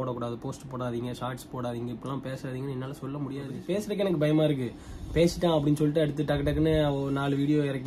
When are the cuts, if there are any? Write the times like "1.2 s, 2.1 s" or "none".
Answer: 3.6 s